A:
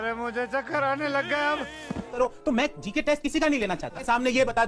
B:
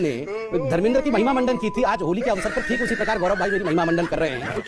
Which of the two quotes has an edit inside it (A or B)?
A